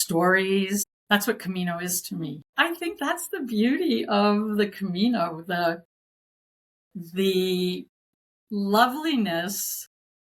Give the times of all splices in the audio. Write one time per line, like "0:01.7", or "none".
0:00.9
0:02.5